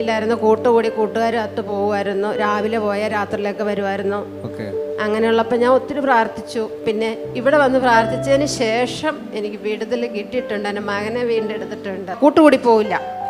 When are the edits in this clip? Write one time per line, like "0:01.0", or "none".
none